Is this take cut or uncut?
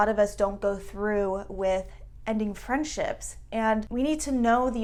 uncut